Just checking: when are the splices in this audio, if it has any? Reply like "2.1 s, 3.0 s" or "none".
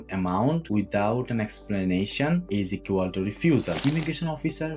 3.8 s